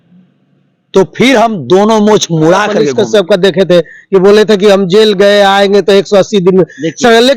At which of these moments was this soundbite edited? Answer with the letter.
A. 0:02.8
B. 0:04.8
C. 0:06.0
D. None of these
A